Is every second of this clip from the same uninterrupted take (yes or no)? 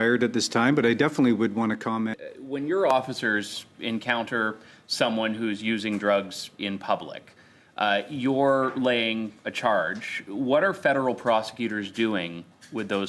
no